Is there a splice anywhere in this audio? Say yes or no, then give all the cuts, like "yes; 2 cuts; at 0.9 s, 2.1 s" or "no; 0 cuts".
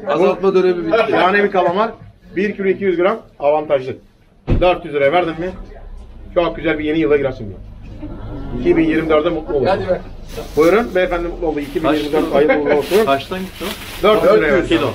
no; 0 cuts